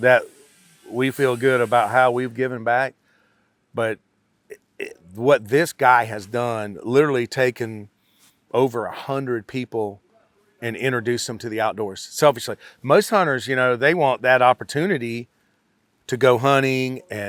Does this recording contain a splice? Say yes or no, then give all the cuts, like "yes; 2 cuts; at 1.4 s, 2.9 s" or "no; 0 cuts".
no; 0 cuts